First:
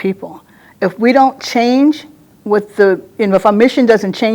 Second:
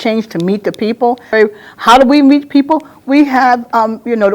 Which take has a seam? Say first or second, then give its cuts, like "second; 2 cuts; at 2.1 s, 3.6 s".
second; 1 cut; at 1.3 s